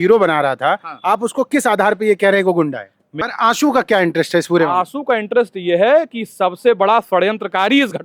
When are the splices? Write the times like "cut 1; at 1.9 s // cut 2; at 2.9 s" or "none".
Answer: cut 1; at 3.1 s